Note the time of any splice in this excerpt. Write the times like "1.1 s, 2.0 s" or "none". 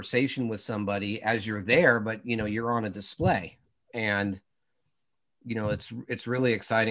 none